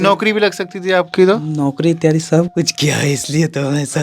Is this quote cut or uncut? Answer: uncut